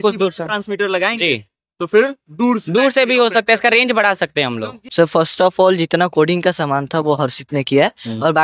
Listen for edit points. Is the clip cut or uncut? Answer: cut